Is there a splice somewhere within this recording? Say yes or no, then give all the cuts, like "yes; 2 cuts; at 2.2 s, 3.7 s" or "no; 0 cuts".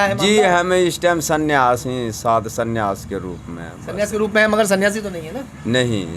no; 0 cuts